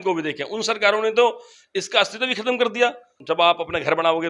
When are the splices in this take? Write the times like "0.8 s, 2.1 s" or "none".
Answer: 3.2 s